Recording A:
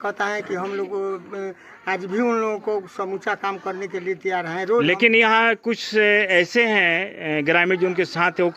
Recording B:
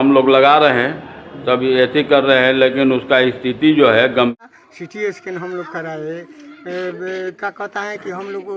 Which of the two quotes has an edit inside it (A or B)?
B